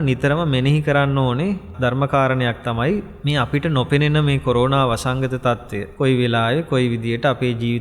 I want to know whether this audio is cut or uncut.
cut